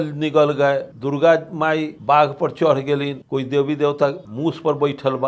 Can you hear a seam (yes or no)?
yes